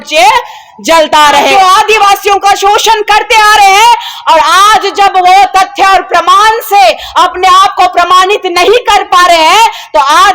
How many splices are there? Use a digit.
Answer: 1